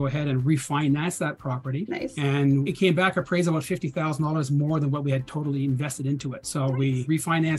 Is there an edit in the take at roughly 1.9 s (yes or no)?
yes